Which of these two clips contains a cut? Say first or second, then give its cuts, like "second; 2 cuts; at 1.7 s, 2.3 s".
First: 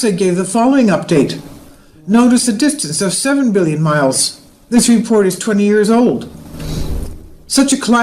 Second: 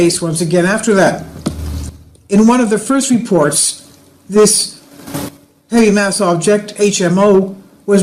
first; 1 cut; at 3.6 s